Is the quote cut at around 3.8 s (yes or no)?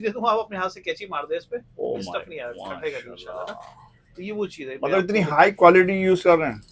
no